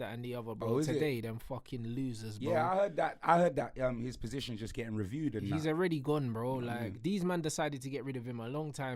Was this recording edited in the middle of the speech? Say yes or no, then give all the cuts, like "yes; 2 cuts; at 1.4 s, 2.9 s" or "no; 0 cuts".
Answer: no; 0 cuts